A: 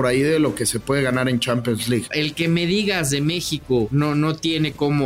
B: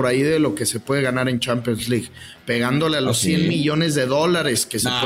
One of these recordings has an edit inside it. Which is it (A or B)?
A